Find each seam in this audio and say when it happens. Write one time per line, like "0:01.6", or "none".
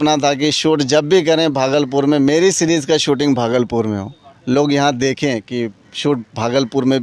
none